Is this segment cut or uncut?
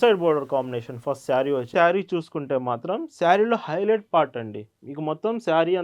cut